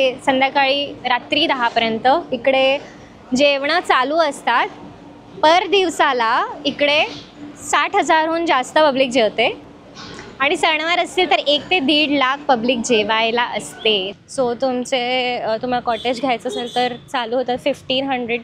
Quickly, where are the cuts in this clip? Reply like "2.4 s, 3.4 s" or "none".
14.1 s